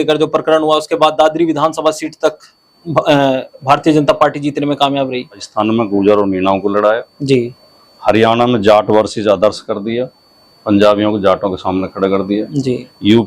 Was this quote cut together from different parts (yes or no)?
yes